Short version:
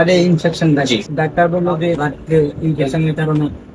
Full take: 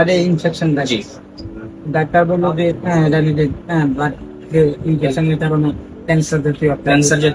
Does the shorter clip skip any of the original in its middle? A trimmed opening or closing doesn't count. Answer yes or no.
yes